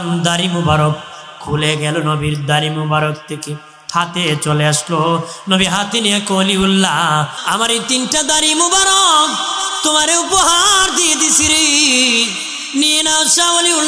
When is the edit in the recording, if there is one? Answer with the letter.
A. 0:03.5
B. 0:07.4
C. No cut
B